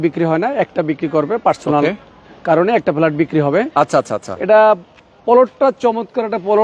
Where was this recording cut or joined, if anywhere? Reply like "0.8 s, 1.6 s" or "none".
none